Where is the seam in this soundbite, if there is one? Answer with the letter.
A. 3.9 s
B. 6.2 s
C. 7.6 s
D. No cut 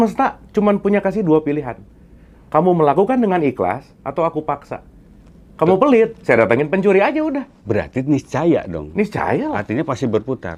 D